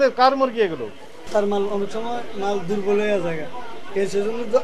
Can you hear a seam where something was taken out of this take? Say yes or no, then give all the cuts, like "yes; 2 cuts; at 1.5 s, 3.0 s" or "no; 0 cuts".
no; 0 cuts